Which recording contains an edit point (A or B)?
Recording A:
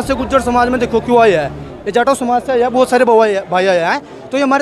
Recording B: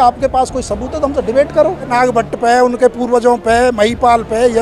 B